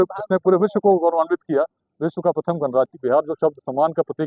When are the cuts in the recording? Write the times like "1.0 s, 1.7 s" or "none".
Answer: 3.0 s